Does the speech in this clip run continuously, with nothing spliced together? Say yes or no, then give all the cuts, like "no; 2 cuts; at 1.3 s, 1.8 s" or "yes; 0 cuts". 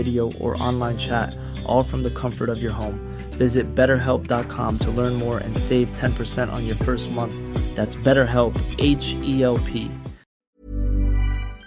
no; 1 cut; at 10.6 s